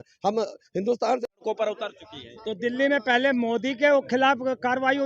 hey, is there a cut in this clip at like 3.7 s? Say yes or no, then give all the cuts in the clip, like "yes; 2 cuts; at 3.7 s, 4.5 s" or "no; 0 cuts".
no; 1 cut; at 1.4 s